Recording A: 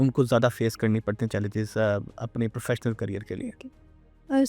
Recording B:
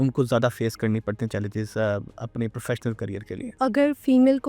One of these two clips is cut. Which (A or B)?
B